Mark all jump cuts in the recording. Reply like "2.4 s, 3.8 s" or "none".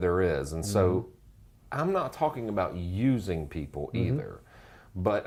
none